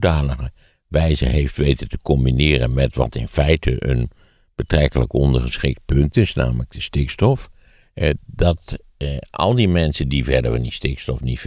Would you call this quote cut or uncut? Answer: uncut